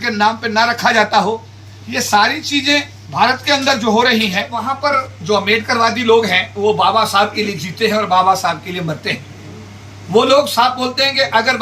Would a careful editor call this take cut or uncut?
cut